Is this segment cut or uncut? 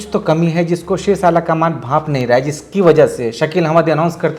uncut